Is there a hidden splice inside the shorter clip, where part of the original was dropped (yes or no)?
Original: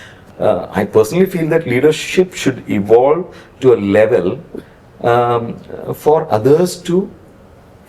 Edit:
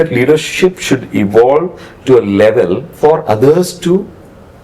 yes